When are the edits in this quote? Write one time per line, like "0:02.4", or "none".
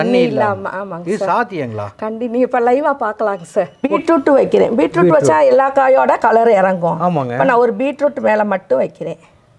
0:04.0